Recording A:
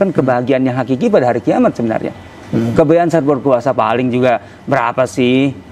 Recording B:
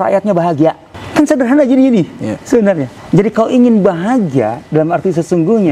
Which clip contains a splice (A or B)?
B